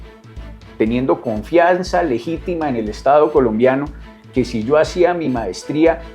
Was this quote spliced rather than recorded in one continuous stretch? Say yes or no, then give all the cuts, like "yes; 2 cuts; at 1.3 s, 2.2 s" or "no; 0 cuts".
no; 0 cuts